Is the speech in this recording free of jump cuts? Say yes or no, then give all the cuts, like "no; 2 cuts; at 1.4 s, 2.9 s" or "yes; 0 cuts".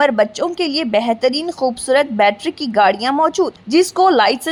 yes; 0 cuts